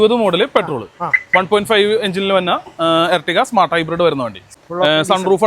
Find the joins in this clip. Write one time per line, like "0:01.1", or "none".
0:04.5